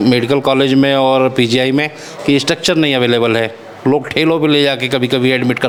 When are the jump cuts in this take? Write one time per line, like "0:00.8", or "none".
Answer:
none

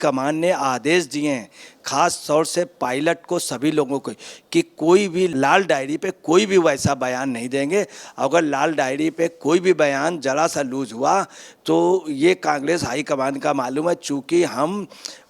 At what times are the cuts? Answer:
0:05.3

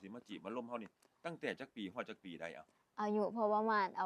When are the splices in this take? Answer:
none

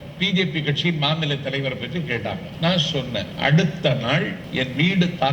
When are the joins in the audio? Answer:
0:02.5
0:03.3
0:04.4

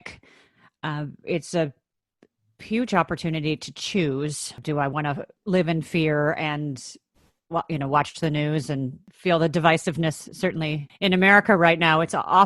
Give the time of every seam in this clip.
0:04.6
0:05.3
0:09.0
0:10.9

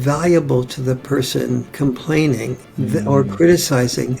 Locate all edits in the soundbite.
0:01.7
0:02.6

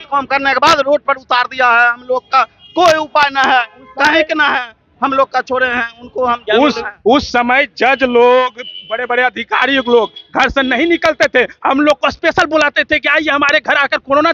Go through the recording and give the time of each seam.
none

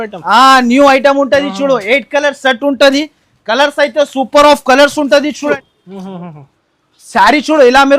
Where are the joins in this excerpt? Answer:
0:05.5

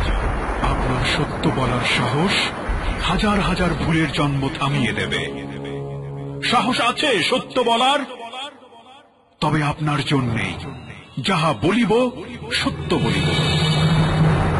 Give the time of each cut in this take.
none

